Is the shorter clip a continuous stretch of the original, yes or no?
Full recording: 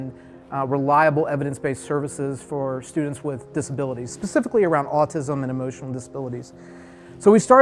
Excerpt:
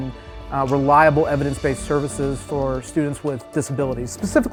yes